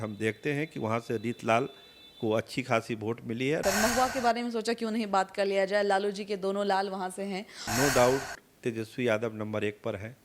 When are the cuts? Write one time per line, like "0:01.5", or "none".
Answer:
0:03.6
0:07.5